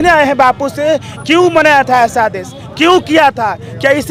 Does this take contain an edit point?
no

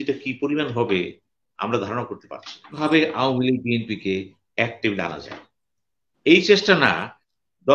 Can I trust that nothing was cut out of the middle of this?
no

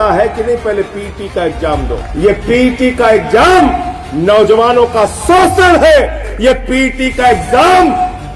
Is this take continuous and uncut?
no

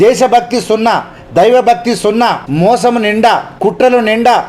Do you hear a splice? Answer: yes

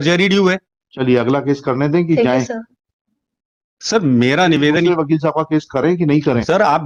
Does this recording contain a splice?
no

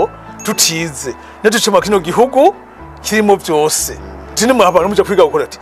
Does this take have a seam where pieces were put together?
no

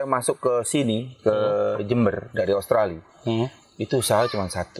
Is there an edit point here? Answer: no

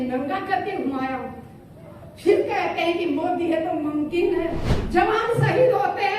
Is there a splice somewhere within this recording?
yes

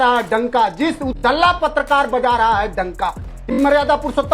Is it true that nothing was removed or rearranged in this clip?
no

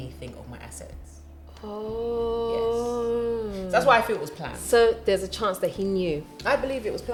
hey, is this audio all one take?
yes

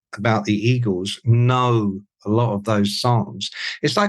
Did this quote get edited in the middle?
no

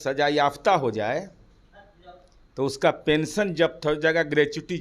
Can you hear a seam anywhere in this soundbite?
no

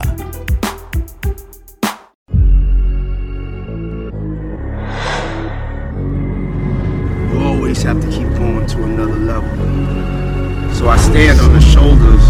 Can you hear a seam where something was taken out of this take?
yes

